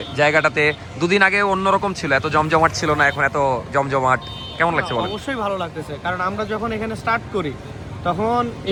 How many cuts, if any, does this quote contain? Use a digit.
0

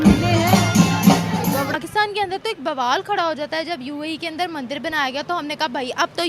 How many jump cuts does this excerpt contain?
1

